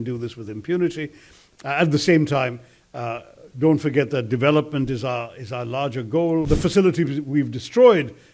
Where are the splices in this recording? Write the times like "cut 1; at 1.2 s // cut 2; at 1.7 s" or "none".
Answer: cut 1; at 6.5 s